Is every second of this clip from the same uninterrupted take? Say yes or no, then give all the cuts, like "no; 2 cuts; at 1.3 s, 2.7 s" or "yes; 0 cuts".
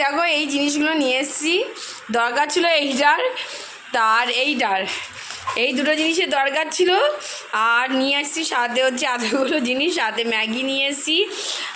yes; 0 cuts